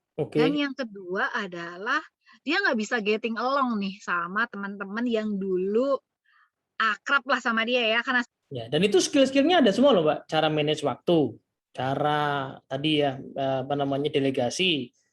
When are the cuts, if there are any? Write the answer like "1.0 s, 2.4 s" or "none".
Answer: 8.3 s

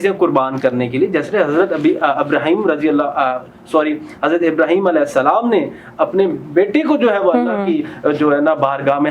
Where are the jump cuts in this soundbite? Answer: none

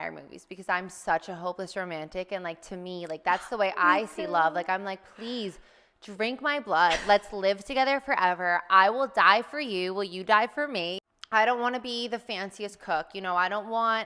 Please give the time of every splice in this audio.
10.9 s

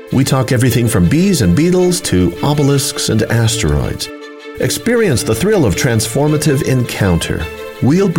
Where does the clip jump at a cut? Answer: none

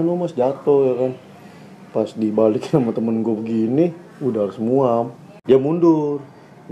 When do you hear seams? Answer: 5.3 s

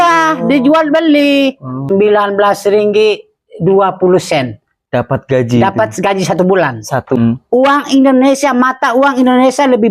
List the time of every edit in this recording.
1.8 s, 7.2 s

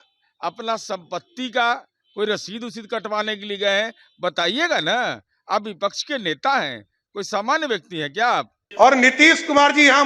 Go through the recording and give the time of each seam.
8.6 s

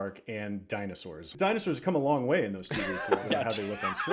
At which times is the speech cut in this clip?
1.2 s

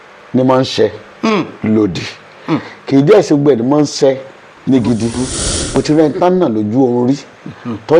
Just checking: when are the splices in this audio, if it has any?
5.8 s

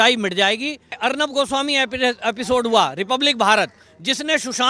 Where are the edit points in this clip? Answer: 1.0 s

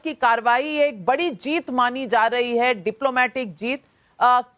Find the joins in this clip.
3.1 s

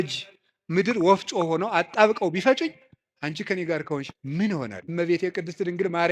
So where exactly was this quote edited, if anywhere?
4.8 s

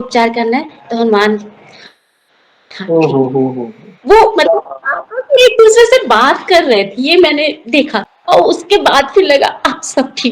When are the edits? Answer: 8.0 s

